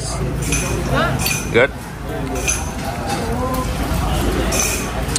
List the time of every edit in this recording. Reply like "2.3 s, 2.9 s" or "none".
none